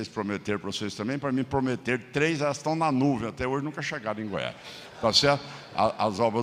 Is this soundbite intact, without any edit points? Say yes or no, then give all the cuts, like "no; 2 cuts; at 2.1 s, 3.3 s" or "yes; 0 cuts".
yes; 0 cuts